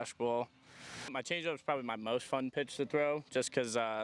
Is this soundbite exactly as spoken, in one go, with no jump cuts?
no; 1 cut; at 1.2 s

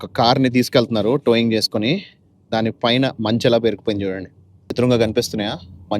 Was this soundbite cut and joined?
yes; 1 cut; at 4.7 s

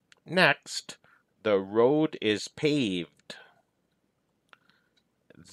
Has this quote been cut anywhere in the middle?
yes; 1 cut; at 4.2 s

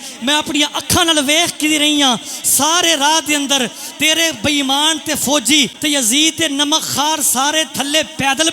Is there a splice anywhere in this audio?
yes; 1 cut; at 5.7 s

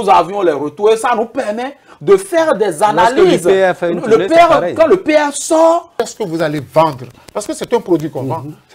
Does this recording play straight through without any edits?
no; 1 cut; at 5.9 s

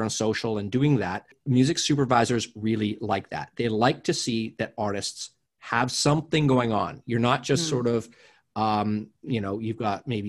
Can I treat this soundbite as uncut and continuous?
no; 1 cut; at 1.3 s

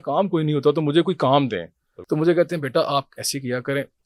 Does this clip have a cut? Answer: yes; 1 cut; at 1.9 s

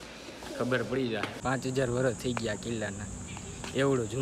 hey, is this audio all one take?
no; 1 cut; at 1.4 s

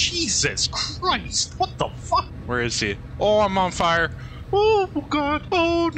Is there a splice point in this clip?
no; 0 cuts

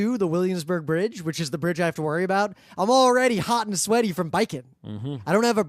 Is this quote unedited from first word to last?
no; 1 cut; at 1.0 s

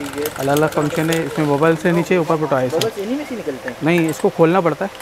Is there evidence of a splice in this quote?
no; 0 cuts

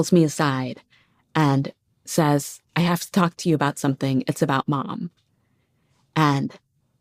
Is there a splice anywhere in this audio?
no; 0 cuts

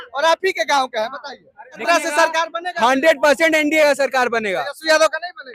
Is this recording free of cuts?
no; 1 cut; at 1.8 s

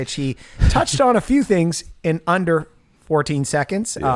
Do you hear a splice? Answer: no; 0 cuts

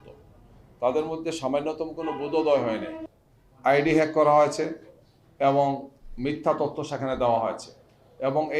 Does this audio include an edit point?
yes; 1 cut; at 3.0 s

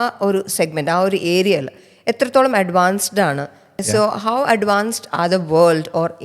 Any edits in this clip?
yes; 1 cut; at 3.7 s

